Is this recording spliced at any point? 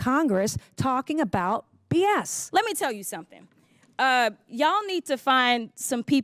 yes; 1 cut; at 2.4 s

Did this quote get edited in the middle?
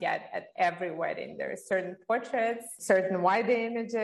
yes; 1 cut; at 2.7 s

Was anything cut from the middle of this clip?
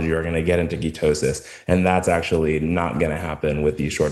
no; 0 cuts

